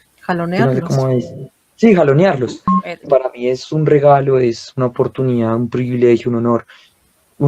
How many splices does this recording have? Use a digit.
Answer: 1